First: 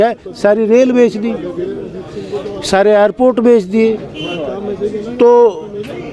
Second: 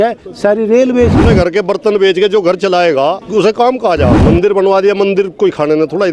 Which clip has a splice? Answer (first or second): second